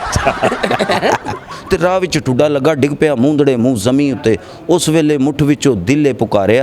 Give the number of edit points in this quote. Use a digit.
1